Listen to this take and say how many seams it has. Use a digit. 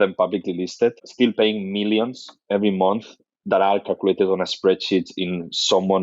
1